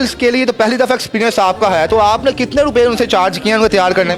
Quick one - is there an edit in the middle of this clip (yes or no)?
no